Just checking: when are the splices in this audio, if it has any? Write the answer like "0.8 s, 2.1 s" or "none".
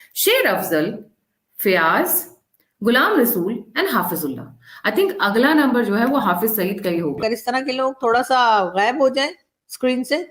7.2 s